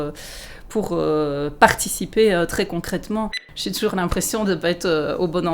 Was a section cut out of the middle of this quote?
yes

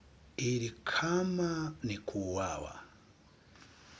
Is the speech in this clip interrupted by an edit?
no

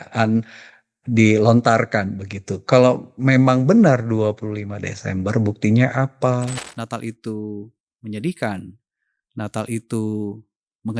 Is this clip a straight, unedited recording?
no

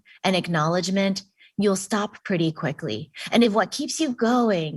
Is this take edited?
yes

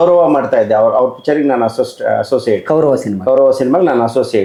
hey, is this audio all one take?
yes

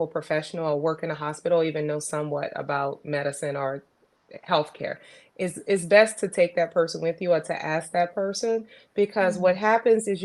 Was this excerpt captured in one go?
yes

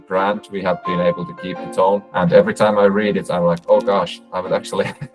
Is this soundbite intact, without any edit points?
no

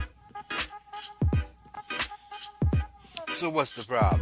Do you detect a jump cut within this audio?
yes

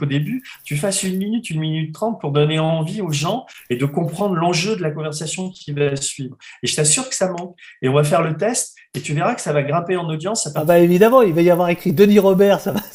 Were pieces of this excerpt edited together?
no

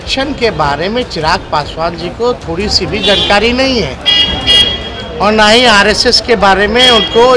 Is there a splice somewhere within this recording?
no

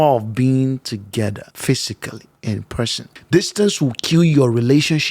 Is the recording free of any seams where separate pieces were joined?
no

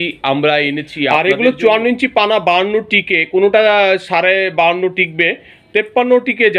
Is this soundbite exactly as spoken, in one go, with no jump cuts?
no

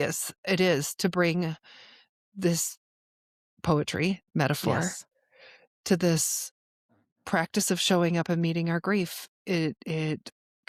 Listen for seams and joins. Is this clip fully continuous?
yes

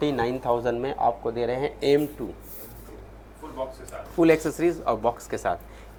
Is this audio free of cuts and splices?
yes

